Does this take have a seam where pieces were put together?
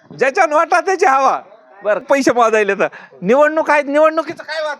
yes; 1 cut; at 2.0 s

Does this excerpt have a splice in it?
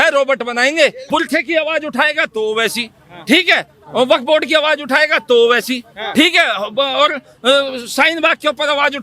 yes; 1 cut; at 1.0 s

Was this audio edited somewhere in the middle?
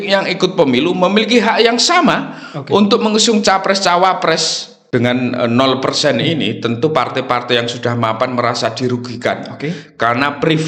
yes; 1 cut; at 4.8 s

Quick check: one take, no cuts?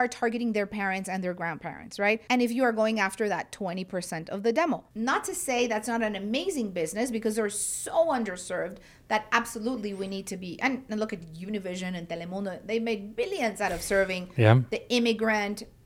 no; 2 cuts; at 2.2 s, 4.9 s

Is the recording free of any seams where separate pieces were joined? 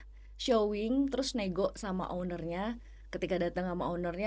yes; 0 cuts

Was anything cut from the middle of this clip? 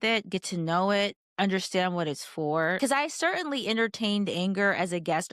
yes; 1 cut; at 2.8 s

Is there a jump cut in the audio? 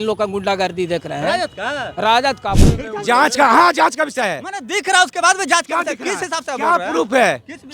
yes; 1 cut; at 2.6 s

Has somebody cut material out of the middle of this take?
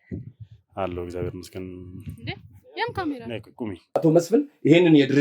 yes; 1 cut; at 4.0 s

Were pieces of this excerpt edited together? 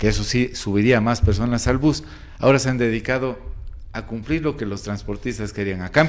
no; 0 cuts

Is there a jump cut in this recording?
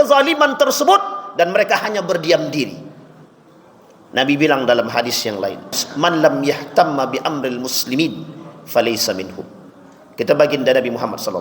yes; 1 cut; at 5.8 s

